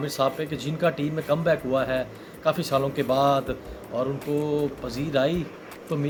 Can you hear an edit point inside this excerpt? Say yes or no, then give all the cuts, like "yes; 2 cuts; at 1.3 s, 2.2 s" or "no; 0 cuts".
no; 0 cuts